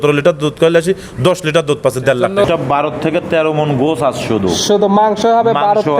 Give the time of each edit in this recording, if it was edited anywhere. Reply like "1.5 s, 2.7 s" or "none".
2.4 s